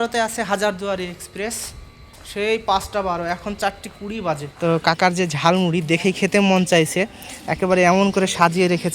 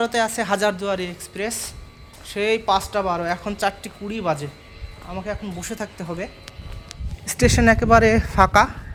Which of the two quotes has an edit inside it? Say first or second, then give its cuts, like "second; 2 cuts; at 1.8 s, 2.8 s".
first; 1 cut; at 4.5 s